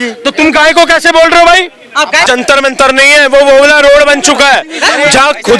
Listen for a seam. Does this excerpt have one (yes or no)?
yes